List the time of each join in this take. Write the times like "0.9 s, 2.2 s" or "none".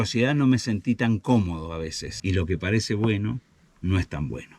2.1 s